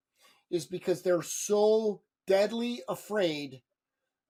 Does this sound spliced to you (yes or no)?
no